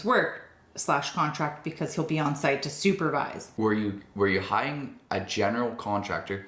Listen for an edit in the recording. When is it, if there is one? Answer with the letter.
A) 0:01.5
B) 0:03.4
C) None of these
B